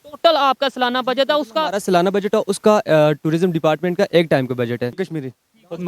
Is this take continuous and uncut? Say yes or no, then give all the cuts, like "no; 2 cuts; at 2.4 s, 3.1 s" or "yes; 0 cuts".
no; 1 cut; at 4.9 s